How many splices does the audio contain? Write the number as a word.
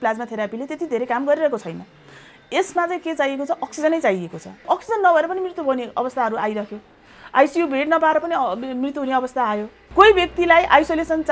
two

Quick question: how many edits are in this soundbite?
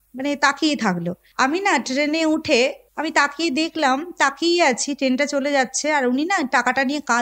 two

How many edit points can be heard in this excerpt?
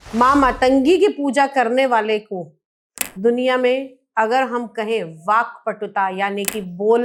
zero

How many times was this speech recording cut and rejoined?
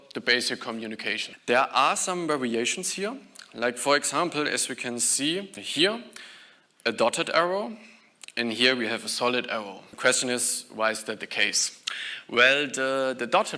three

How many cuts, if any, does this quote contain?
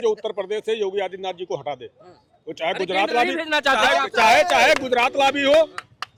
zero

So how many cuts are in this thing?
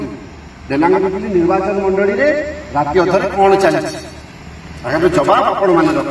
zero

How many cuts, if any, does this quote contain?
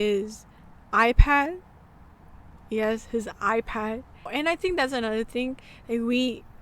one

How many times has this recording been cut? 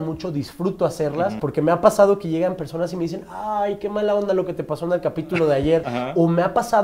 two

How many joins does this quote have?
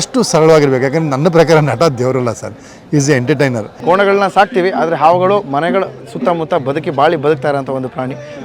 one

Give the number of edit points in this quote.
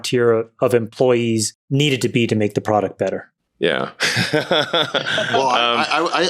two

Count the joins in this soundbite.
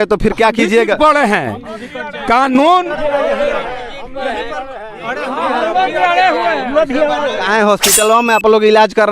one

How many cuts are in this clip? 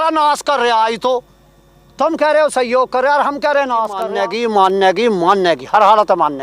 one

